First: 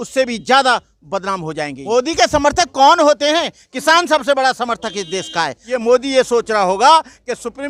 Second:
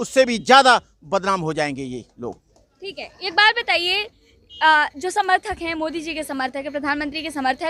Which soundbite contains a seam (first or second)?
first